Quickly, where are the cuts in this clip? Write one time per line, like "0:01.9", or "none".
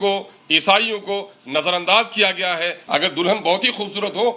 0:02.8